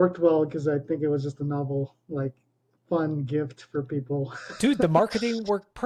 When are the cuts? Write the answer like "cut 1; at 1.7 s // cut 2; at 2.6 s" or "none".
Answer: none